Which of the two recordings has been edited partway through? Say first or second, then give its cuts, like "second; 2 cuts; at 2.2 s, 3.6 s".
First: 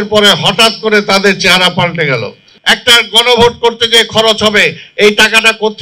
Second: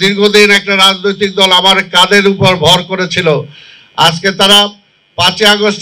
first; 1 cut; at 2.5 s